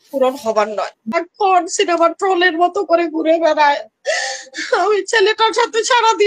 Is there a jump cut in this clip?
yes; 1 cut; at 1.2 s

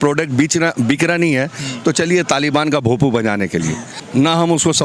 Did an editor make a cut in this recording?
yes; 1 cut; at 3.9 s

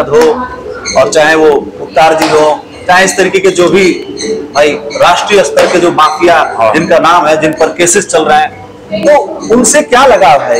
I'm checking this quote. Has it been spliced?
no; 0 cuts

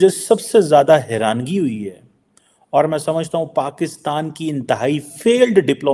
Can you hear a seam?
no; 0 cuts

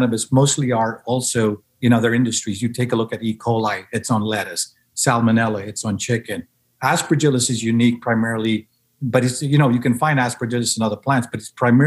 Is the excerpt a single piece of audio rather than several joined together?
yes; 0 cuts

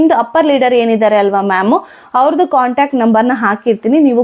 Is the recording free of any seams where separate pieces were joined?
yes; 0 cuts

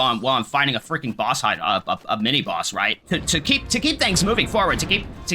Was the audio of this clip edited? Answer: yes; 1 cut; at 3.0 s

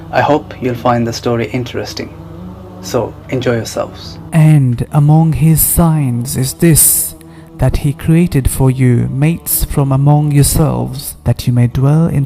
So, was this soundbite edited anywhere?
yes; 1 cut; at 4.4 s

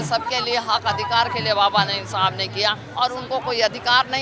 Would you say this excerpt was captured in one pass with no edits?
no; 1 cut; at 2.8 s

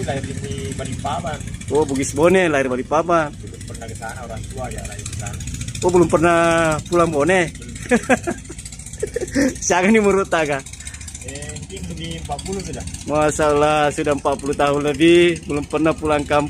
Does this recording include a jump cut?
no; 0 cuts

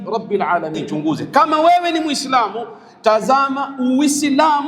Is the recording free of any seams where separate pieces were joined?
no; 1 cut; at 1.2 s

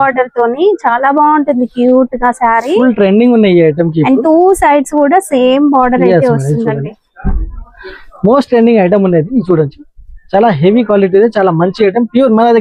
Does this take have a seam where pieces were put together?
no; 0 cuts

